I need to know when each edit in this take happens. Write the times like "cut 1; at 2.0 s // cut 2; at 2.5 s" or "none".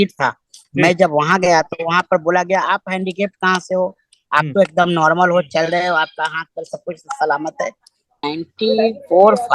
cut 1; at 8.2 s